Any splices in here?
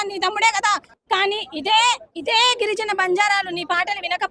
yes; 1 cut; at 0.9 s

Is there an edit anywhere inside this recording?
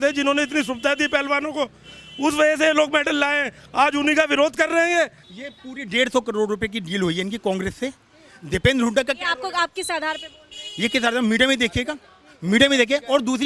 yes; 1 cut; at 5.2 s

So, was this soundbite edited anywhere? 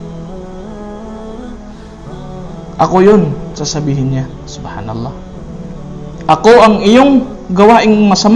yes; 1 cut; at 2.8 s

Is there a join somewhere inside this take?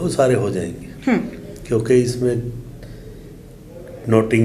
no; 0 cuts

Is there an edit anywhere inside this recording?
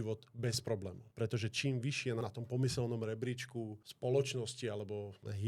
yes; 1 cut; at 2.2 s

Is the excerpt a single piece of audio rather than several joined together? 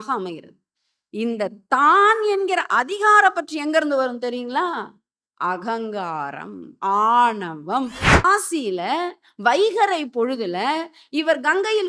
no; 1 cut; at 8.2 s

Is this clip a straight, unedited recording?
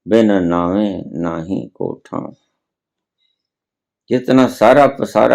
yes; 0 cuts

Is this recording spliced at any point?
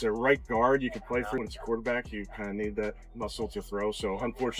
yes; 1 cut; at 1.4 s

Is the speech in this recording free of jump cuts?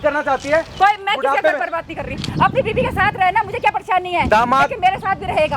yes; 0 cuts

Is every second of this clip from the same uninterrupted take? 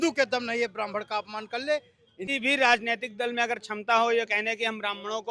no; 1 cut; at 2.2 s

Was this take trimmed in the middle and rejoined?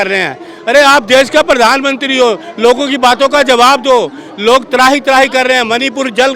no; 0 cuts

